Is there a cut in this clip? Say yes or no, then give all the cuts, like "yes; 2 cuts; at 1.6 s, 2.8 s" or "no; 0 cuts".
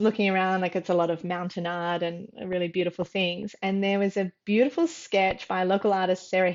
no; 0 cuts